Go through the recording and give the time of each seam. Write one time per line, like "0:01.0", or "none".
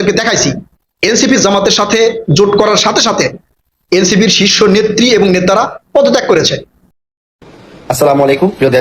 0:07.1